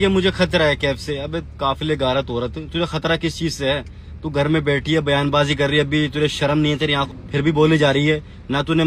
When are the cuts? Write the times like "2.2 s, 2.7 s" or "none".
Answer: 7.1 s